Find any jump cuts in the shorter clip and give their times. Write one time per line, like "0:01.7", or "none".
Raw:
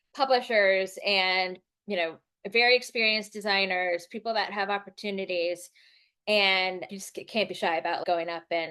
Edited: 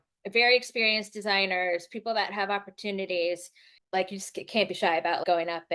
0:04.0